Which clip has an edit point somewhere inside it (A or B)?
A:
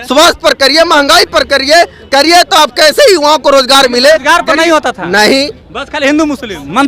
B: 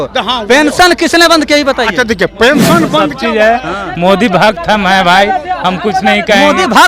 B